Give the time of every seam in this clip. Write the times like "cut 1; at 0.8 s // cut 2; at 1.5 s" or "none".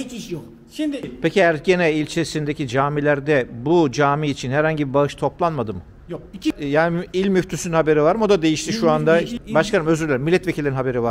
cut 1; at 1.1 s // cut 2; at 6.6 s // cut 3; at 9.4 s

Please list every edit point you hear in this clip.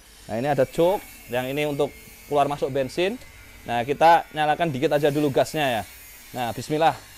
none

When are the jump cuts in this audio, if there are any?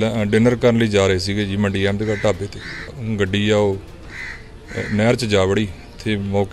cut 1; at 3.0 s

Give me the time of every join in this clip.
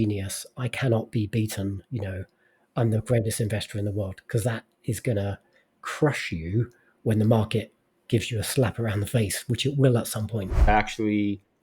cut 1; at 10.7 s

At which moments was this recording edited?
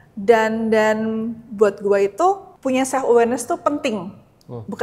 cut 1; at 2.5 s

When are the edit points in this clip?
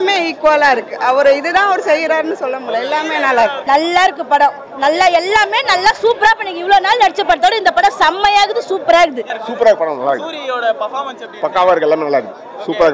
cut 1; at 3.6 s // cut 2; at 9.2 s

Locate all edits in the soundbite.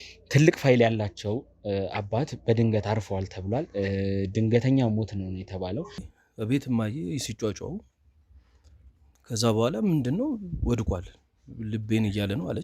cut 1; at 6.1 s

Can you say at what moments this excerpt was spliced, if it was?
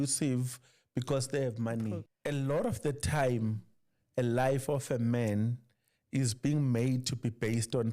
cut 1; at 2.1 s

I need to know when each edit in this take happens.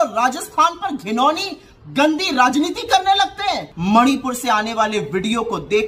cut 1; at 3.7 s

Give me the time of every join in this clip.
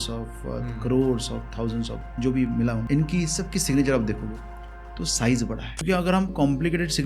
cut 1; at 2.8 s // cut 2; at 5.8 s

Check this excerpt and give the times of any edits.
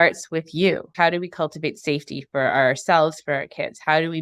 cut 1; at 0.9 s

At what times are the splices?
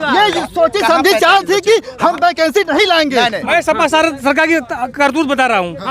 cut 1; at 3.4 s

